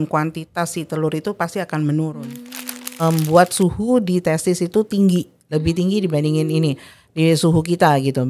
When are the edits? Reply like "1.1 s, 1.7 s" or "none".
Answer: 3.0 s